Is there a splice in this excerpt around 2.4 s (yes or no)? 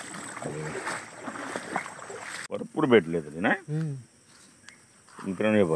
yes